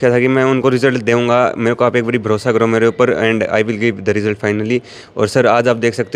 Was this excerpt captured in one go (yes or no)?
yes